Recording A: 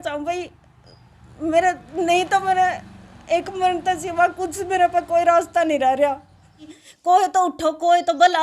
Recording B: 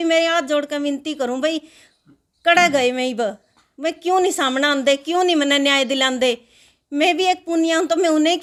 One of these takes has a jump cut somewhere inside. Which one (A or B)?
A